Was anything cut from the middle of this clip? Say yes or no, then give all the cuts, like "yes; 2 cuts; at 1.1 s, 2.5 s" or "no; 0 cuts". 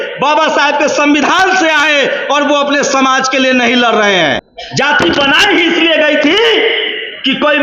yes; 1 cut; at 4.5 s